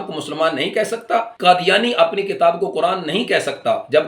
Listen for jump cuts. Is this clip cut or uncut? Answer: cut